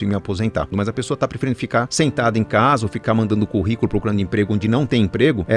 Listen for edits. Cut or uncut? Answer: cut